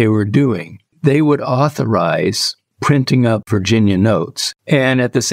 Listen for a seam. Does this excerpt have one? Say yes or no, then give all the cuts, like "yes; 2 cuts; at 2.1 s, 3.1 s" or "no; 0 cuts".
yes; 2 cuts; at 3.5 s, 4.4 s